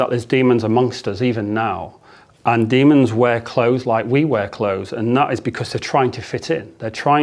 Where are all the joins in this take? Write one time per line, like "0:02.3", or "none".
none